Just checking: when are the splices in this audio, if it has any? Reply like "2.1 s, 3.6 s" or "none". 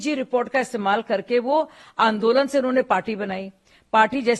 none